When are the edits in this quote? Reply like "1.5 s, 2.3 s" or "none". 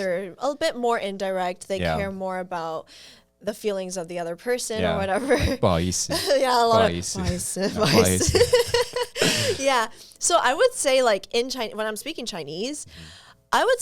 none